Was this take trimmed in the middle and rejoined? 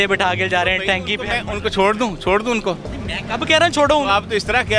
no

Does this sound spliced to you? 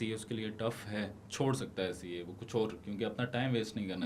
yes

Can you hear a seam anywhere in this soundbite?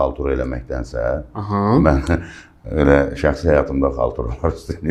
no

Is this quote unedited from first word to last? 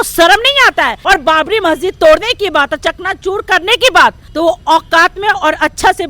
no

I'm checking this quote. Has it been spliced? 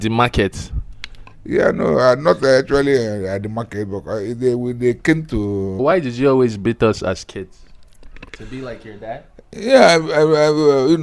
yes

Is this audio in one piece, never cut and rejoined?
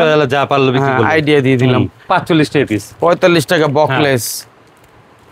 no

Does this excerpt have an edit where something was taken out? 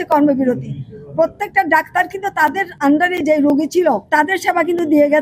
yes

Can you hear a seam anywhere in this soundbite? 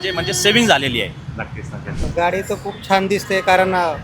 yes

